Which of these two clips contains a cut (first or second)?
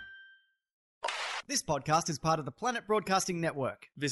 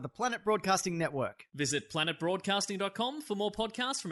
first